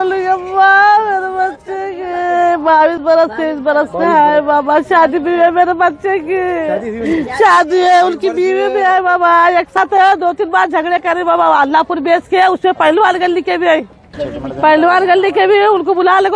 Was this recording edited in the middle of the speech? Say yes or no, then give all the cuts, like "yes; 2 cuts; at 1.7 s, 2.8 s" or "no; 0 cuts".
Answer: yes; 2 cuts; at 9.8 s, 14.2 s